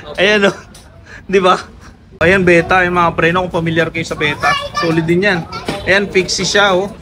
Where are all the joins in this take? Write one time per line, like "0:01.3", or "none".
0:02.2